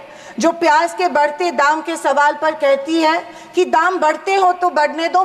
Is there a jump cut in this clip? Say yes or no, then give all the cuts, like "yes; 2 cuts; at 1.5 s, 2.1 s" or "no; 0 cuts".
no; 0 cuts